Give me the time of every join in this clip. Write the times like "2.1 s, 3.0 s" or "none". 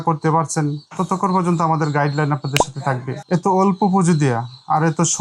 3.2 s